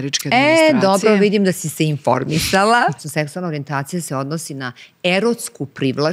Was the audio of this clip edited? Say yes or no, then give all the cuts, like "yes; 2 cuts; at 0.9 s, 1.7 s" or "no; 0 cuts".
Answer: yes; 1 cut; at 3.0 s